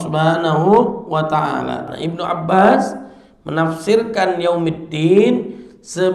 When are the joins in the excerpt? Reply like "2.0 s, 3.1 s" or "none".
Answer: 1.8 s